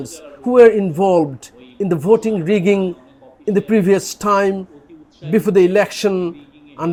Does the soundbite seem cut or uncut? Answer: uncut